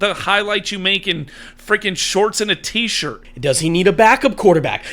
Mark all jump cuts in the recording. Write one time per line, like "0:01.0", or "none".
0:03.2